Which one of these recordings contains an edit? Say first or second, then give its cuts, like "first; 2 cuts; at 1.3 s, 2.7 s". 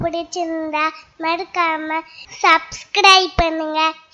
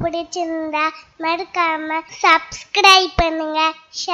second; 1 cut; at 2.1 s